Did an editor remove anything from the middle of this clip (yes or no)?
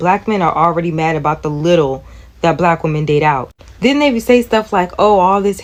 no